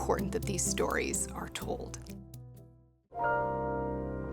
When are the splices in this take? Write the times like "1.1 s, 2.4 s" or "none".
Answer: 3.2 s